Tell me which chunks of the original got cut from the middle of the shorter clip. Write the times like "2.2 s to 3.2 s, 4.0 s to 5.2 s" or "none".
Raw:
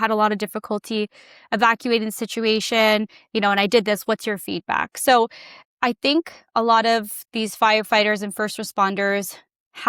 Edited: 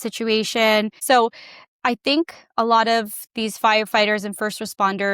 3.1 s to 4.9 s